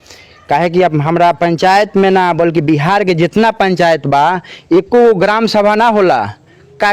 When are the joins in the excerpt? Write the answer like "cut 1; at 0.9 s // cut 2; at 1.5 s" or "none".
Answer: none